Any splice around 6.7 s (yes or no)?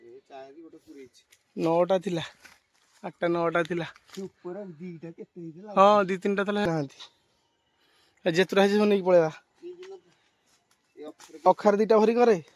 yes